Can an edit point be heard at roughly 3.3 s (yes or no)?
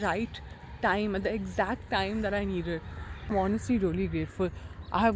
yes